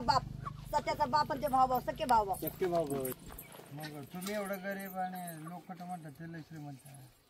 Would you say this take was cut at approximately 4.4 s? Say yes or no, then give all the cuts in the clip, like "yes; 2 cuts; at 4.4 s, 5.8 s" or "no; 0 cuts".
no; 1 cut; at 3.1 s